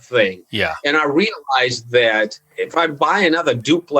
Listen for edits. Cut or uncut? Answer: cut